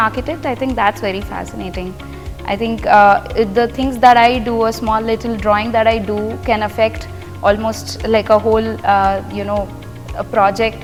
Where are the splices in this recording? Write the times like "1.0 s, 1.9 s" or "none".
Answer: none